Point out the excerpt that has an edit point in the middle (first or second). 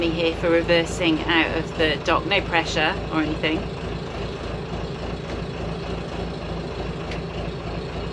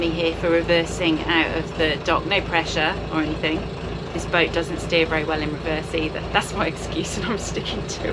second